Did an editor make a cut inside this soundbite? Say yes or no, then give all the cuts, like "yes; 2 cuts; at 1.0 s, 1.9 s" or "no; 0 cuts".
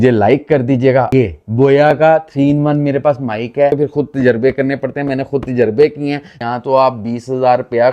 yes; 3 cuts; at 1.1 s, 3.7 s, 6.3 s